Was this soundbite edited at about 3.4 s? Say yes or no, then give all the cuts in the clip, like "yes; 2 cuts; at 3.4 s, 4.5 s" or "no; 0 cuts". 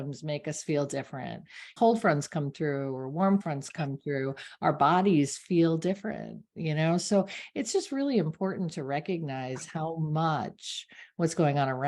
yes; 2 cuts; at 1.7 s, 3.4 s